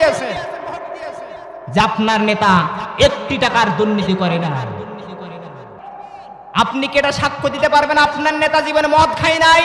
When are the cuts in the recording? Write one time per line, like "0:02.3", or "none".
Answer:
0:05.8